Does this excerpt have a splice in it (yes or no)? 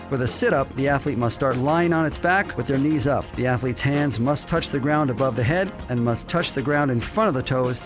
yes